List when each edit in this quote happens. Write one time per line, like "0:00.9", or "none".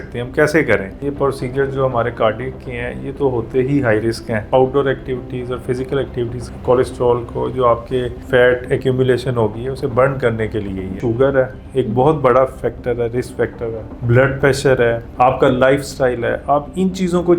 0:01.0
0:04.4
0:06.4
0:08.2
0:11.0
0:13.9
0:15.1